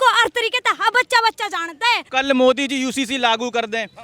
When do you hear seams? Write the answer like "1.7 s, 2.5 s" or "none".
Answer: 2.1 s

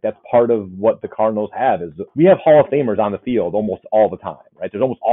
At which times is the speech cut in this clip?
2.0 s

